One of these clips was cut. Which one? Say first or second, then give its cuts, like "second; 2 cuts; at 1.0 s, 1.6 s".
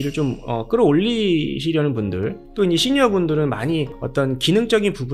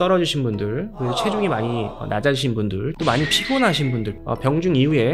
second; 2 cuts; at 3.0 s, 4.2 s